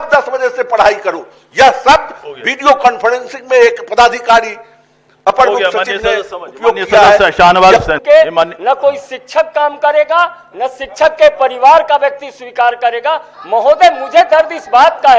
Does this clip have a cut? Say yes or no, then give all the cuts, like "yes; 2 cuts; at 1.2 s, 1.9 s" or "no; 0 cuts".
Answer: yes; 1 cut; at 8.0 s